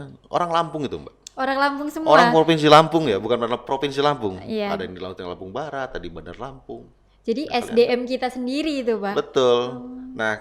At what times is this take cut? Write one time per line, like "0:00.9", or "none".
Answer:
none

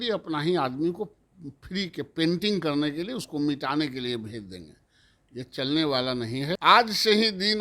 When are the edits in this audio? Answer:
0:06.6

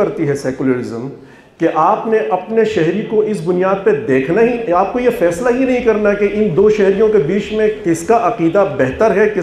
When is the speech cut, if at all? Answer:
none

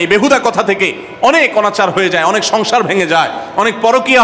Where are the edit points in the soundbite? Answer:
none

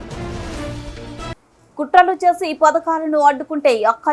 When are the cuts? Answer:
0:01.3

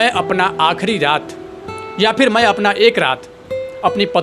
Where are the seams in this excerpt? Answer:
none

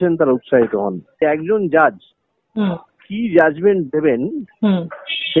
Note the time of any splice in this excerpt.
0:01.2

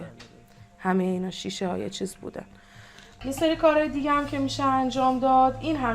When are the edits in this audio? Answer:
0:03.2

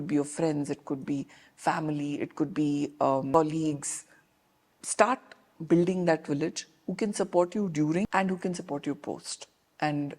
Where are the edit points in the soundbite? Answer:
0:03.3
0:08.1

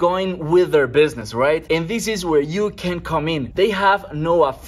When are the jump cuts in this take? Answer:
0:01.3
0:03.5

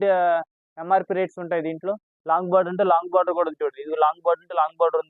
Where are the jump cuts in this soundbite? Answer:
0:02.1

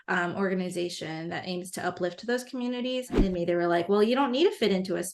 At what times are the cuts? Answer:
0:03.2

